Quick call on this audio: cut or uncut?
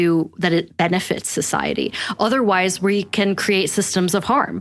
uncut